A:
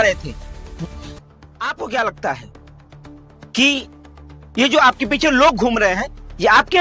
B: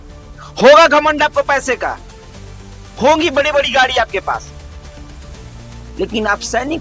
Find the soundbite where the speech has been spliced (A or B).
A